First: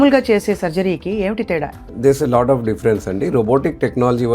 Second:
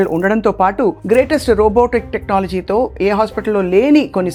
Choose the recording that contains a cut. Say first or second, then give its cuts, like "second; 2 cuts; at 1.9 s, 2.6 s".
first; 1 cut; at 1.8 s